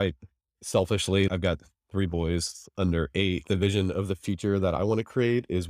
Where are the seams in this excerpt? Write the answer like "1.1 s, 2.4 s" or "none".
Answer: 1.3 s, 3.4 s